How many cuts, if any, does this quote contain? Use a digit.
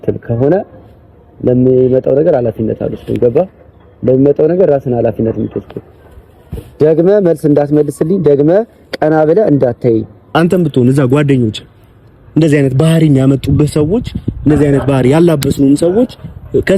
1